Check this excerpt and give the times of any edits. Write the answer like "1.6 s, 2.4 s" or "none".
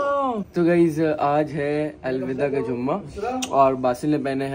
none